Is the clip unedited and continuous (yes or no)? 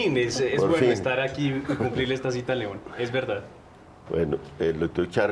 no